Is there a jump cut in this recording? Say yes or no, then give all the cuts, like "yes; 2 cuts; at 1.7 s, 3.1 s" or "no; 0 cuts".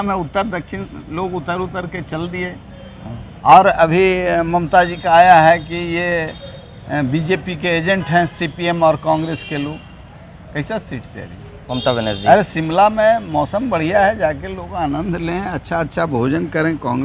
no; 0 cuts